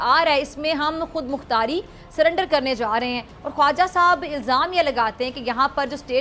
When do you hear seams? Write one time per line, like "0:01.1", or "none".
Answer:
none